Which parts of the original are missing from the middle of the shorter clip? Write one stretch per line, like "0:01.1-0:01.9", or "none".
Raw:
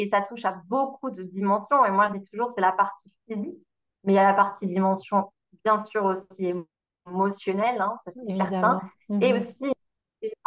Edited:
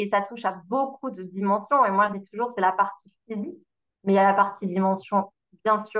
none